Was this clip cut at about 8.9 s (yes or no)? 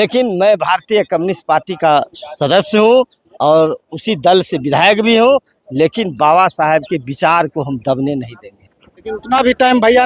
yes